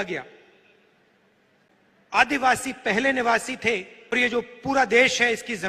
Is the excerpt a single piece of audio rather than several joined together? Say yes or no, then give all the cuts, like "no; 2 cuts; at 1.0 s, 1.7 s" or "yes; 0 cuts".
no; 2 cuts; at 1.7 s, 4.1 s